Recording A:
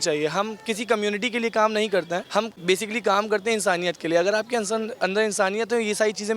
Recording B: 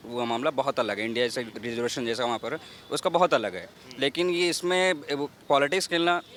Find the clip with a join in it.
A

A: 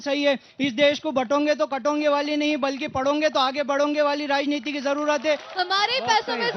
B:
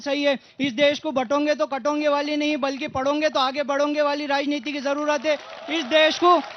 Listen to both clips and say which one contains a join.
A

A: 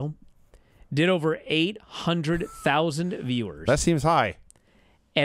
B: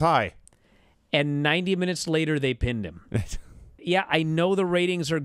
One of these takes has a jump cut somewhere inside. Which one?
B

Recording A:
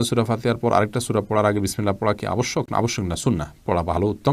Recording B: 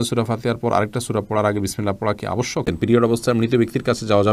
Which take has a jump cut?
B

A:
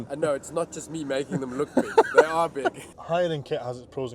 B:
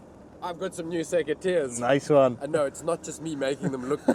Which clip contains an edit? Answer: A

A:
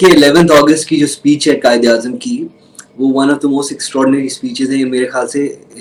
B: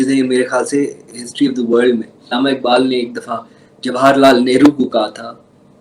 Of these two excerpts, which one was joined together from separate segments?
B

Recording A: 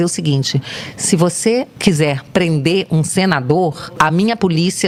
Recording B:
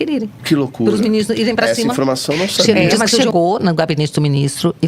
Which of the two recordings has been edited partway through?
B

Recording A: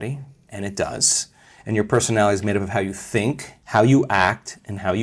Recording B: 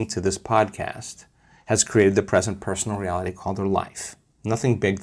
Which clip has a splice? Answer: A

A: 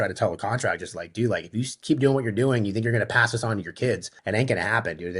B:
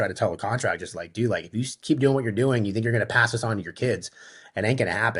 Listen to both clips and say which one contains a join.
A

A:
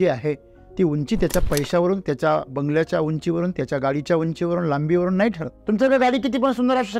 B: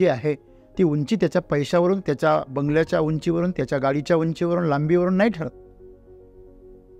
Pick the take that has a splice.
A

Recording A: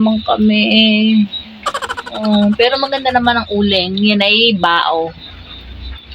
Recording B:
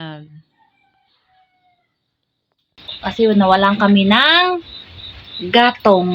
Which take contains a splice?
B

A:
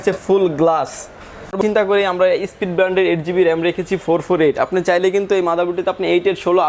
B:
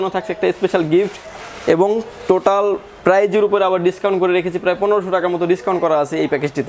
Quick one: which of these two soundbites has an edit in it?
A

